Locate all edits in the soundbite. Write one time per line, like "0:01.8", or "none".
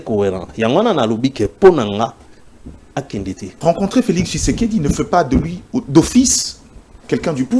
0:03.5